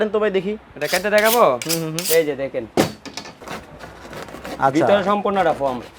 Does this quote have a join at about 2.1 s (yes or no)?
no